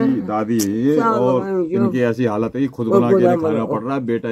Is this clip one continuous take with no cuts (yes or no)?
yes